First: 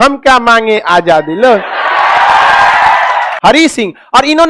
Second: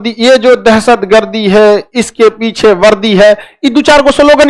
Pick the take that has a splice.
first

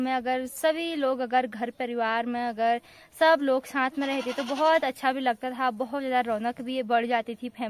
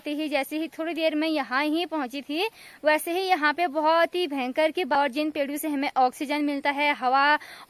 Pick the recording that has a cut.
second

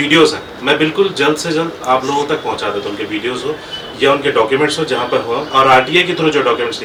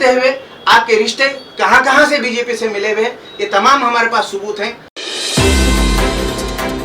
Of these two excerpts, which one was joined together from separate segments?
second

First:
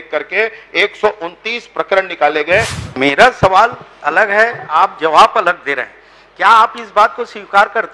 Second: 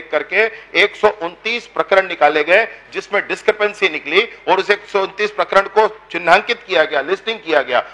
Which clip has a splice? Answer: first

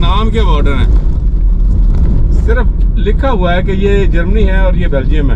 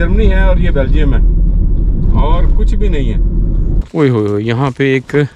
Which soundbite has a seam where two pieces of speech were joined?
second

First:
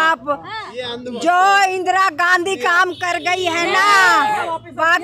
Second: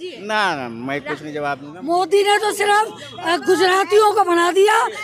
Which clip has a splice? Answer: second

